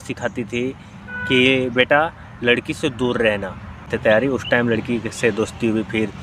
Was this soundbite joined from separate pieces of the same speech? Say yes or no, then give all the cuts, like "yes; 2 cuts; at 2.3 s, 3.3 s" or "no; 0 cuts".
yes; 1 cut; at 3.9 s